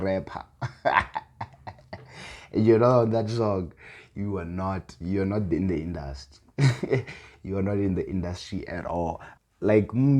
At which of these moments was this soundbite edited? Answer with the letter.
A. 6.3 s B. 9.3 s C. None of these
B